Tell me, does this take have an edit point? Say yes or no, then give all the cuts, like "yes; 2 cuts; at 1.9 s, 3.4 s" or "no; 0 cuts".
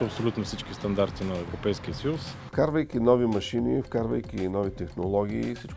yes; 1 cut; at 2.4 s